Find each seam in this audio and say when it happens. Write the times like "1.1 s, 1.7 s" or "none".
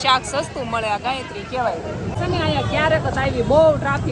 none